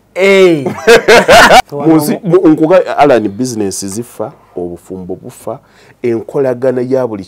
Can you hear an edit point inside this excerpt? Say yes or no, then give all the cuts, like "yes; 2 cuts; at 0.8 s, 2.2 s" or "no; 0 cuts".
yes; 1 cut; at 1.6 s